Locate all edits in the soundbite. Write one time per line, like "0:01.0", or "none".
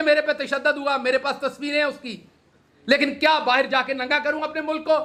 none